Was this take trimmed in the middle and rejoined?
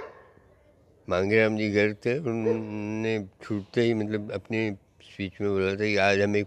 no; 0 cuts

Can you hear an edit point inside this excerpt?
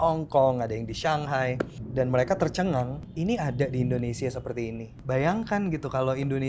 yes; 3 cuts; at 1.8 s, 3.0 s, 4.9 s

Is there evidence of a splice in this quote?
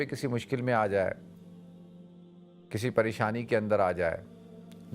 yes; 2 cuts; at 1.2 s, 2.7 s

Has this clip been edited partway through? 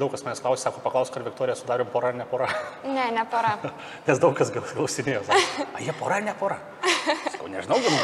no; 0 cuts

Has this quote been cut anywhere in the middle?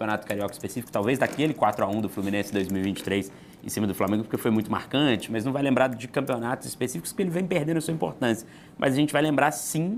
no; 0 cuts

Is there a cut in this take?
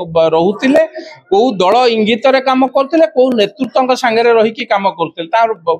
no; 0 cuts

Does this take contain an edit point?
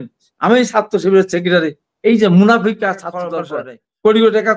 yes; 1 cut; at 3.5 s

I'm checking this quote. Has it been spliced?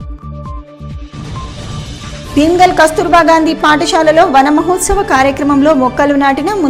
no; 0 cuts

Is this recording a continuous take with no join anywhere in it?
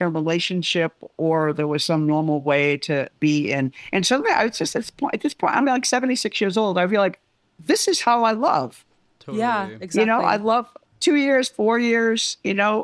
yes; 0 cuts

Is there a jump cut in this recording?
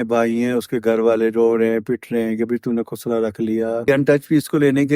yes; 1 cut; at 3.9 s

